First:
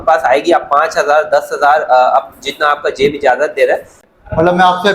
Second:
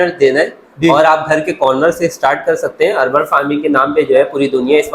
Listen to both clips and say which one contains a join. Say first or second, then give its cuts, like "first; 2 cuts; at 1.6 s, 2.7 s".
first; 1 cut; at 3.9 s